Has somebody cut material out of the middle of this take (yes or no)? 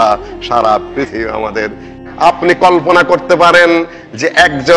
yes